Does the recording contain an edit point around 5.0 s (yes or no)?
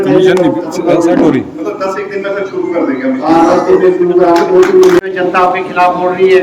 yes